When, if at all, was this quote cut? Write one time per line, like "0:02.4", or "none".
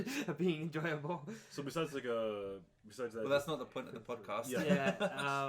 0:02.3